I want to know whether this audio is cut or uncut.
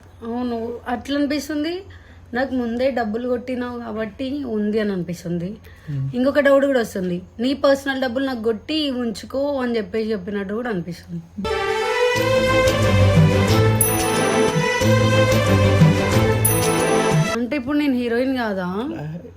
cut